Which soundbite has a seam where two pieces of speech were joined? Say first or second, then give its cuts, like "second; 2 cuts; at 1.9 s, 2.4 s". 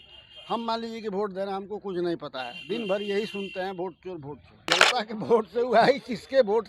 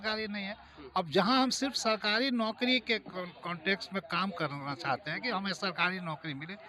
first; 1 cut; at 4.5 s